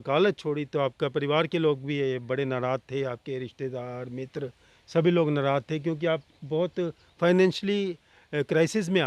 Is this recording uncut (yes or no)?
yes